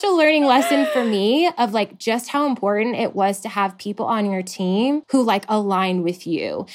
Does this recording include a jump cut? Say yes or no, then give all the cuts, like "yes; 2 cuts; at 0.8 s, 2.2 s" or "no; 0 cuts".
yes; 1 cut; at 5.0 s